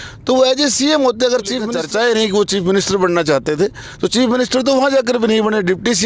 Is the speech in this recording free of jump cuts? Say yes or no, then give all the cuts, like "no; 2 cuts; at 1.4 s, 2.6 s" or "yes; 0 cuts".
no; 1 cut; at 1.6 s